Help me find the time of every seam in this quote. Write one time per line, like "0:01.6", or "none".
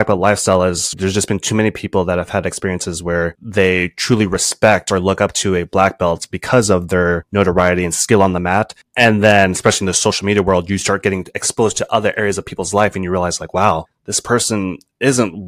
0:00.9
0:07.2